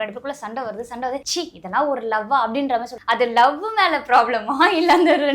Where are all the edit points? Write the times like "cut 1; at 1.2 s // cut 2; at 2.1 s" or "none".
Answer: cut 1; at 1.3 s // cut 2; at 2.9 s

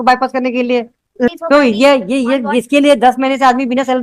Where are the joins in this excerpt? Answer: cut 1; at 1.3 s

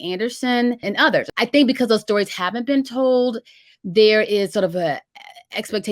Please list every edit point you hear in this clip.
cut 1; at 1.0 s

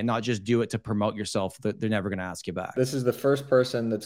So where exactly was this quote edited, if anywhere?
cut 1; at 2.7 s

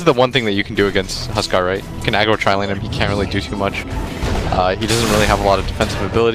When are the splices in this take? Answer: none

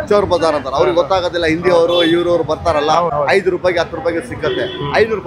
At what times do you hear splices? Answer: cut 1; at 3.1 s

